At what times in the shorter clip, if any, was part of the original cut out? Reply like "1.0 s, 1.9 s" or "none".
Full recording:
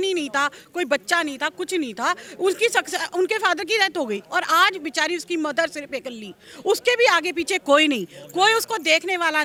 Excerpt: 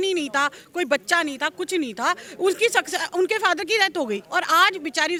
none